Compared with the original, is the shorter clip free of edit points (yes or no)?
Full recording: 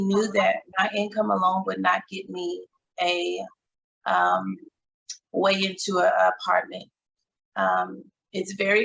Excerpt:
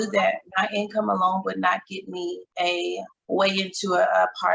no